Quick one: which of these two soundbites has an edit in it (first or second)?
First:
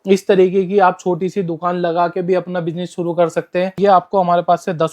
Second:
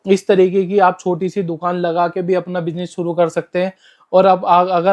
first